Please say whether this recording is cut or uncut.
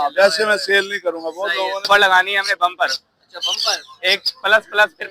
cut